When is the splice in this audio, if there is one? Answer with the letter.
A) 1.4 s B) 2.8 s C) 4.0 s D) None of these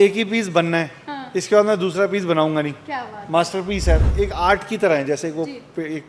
C